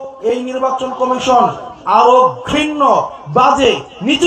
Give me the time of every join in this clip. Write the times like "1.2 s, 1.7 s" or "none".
none